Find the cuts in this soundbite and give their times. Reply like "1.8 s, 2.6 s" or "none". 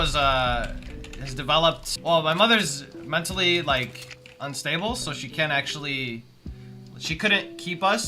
1.9 s

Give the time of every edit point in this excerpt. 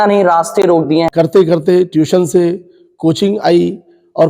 1.1 s

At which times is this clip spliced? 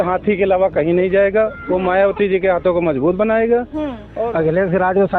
4.1 s

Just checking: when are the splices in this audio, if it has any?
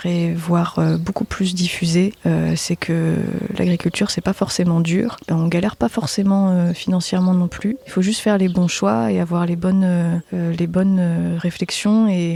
none

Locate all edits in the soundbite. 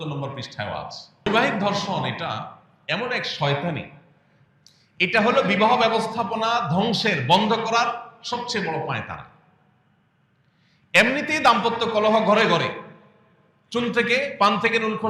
1.0 s

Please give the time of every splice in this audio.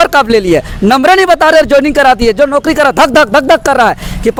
none

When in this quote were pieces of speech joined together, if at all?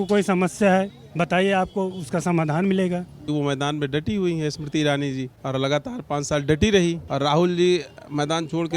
3.3 s, 5.3 s, 7.0 s

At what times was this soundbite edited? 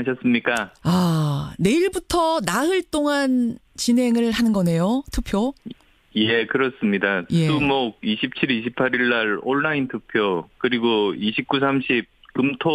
11.7 s

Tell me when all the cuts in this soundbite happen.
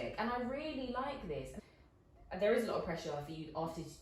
1.5 s

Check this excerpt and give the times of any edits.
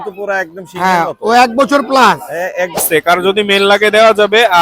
2.8 s

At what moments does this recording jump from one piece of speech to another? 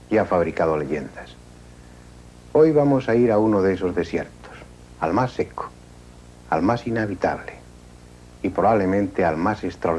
none

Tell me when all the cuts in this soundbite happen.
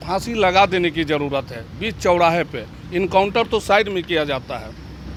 none

